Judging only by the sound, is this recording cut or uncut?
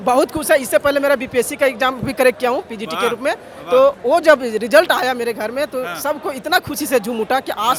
uncut